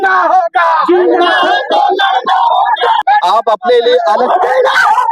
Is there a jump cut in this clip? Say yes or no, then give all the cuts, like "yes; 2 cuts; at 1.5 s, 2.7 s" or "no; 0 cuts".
yes; 1 cut; at 3.0 s